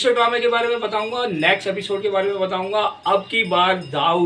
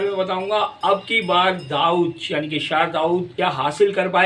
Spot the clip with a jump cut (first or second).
second